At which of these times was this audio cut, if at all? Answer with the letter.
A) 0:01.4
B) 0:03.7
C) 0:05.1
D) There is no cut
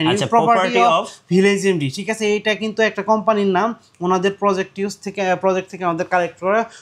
D